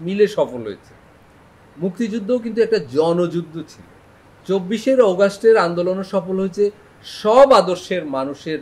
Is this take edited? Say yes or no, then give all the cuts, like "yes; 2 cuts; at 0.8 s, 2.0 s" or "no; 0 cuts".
no; 0 cuts